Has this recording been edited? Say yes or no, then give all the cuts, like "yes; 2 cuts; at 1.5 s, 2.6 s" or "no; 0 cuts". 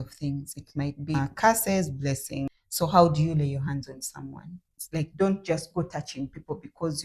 yes; 3 cuts; at 1.2 s, 2.4 s, 4.8 s